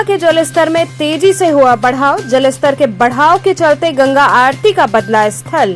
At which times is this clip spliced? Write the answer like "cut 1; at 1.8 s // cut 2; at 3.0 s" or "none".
none